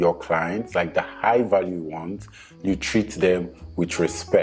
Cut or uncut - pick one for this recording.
uncut